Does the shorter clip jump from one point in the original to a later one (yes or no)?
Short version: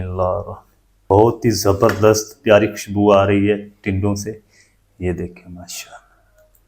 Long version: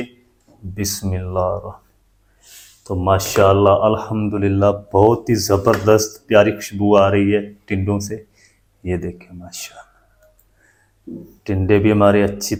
yes